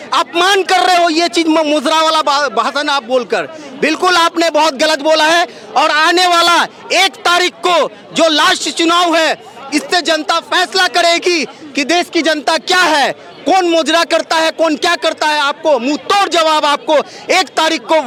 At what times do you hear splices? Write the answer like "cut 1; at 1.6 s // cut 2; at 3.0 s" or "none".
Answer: none